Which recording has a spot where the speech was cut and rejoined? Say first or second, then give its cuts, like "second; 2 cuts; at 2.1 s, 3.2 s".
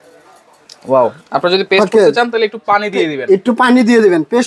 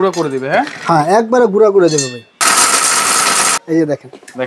second; 2 cuts; at 2.4 s, 3.6 s